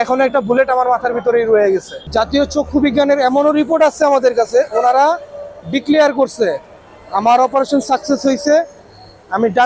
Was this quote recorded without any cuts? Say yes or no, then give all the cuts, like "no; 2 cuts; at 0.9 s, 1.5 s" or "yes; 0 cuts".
no; 1 cut; at 2.0 s